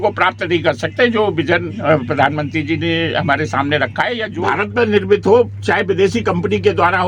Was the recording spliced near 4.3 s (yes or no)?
yes